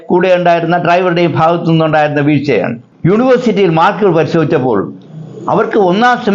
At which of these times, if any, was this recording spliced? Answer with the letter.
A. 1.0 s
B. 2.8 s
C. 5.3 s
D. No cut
B